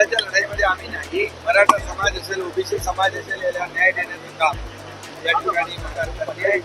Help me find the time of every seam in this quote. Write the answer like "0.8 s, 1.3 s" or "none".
1.4 s, 5.8 s